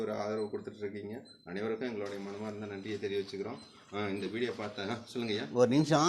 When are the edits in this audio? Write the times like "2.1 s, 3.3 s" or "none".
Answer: none